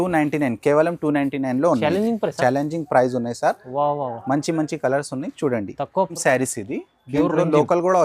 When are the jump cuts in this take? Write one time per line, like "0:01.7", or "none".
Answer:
0:06.2